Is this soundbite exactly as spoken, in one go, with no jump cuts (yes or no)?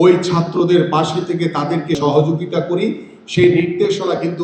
no